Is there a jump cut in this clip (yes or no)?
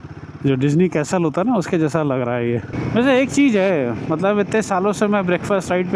yes